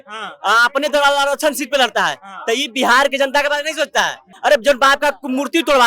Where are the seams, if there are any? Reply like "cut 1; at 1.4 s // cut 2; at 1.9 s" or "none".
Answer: cut 1; at 4.2 s